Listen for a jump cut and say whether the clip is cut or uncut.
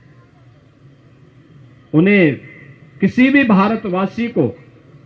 uncut